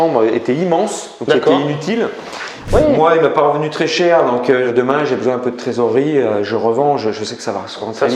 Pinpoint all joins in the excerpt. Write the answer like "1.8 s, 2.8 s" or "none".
2.6 s, 4.7 s